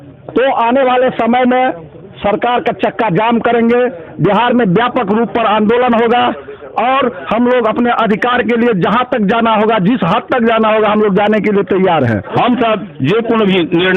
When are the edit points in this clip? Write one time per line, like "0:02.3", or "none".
0:12.3